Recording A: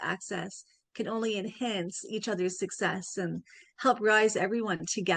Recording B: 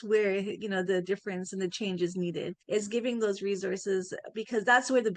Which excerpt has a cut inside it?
B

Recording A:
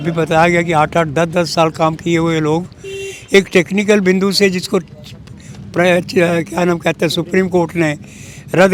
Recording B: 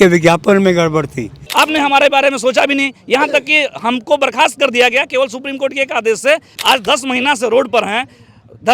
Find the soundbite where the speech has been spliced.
B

